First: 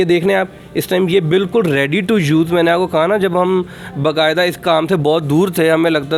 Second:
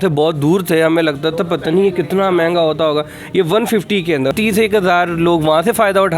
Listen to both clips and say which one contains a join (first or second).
second